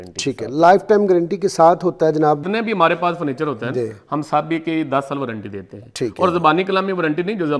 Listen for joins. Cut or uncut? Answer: cut